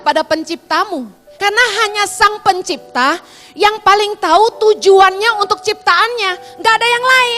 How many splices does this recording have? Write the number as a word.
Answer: one